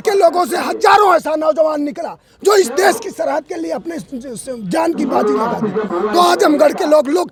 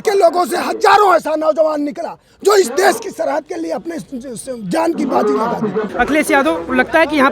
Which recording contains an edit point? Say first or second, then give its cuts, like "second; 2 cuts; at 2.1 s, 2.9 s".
second; 1 cut; at 5.9 s